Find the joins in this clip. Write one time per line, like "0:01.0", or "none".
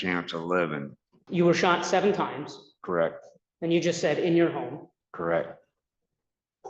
0:01.1

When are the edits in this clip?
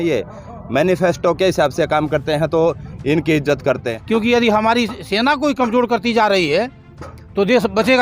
0:03.9

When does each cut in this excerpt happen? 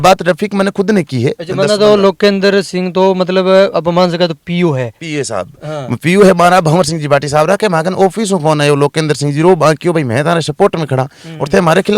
none

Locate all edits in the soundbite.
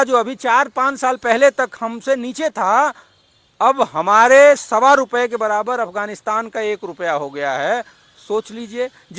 none

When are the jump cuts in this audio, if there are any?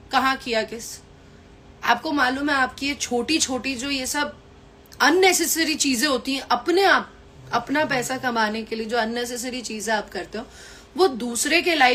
none

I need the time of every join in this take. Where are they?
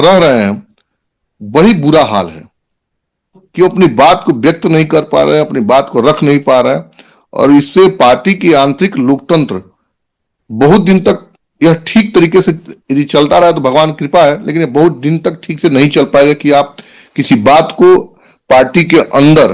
none

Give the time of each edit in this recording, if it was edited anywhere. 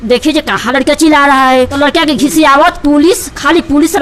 0:01.7

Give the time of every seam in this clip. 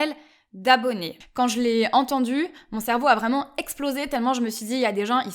0:01.1

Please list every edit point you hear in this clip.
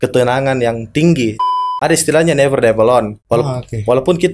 0:01.4
0:03.2

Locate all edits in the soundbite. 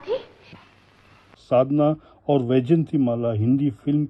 0:01.4

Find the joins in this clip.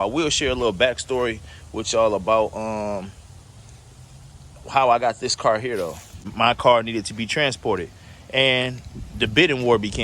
0:06.3

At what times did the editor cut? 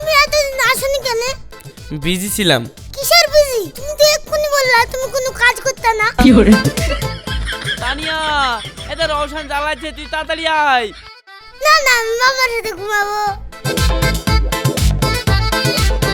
none

